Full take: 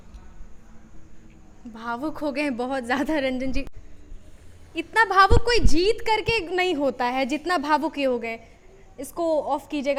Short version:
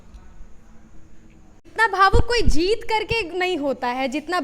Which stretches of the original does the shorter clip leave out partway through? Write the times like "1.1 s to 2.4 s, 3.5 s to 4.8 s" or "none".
1.7 s to 4.9 s